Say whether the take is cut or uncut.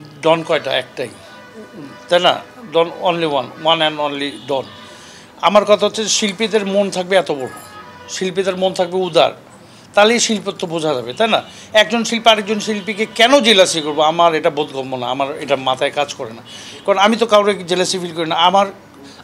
uncut